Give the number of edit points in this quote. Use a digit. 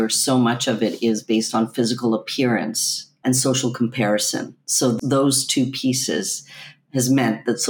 2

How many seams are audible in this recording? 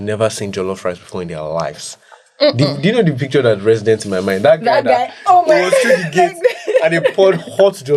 0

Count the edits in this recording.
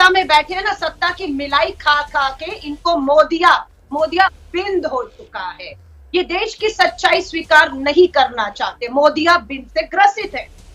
1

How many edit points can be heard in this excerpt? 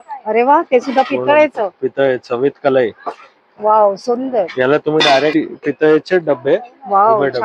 1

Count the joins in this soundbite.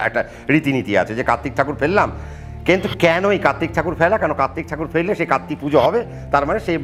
0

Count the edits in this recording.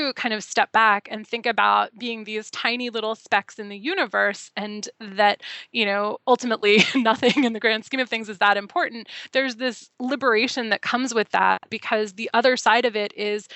1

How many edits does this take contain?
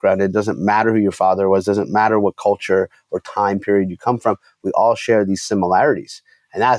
0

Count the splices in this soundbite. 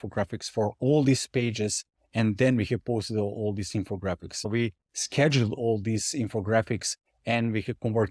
1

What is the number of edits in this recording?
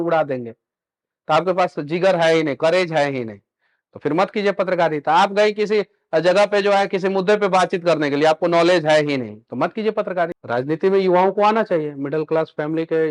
1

